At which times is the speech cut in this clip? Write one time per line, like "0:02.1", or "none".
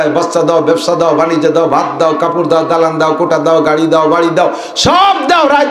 none